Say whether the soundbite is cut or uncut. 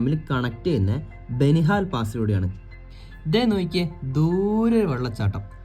uncut